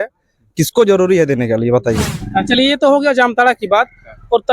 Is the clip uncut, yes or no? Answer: no